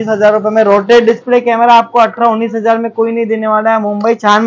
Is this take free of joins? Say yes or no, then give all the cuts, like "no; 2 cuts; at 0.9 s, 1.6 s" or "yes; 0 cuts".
yes; 0 cuts